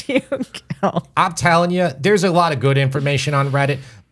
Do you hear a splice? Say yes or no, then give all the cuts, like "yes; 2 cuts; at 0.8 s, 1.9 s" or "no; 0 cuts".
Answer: yes; 1 cut; at 1.1 s